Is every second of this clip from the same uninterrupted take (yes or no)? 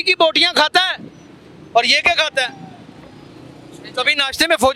yes